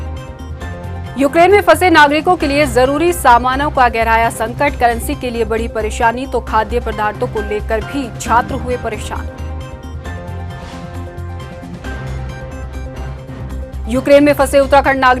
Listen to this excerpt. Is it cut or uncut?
cut